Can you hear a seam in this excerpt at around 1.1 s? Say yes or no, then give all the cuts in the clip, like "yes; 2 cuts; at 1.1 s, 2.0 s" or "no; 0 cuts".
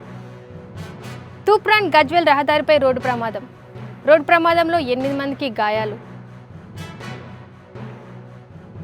yes; 1 cut; at 1.1 s